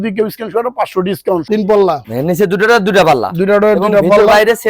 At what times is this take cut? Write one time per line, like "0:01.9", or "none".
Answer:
0:01.5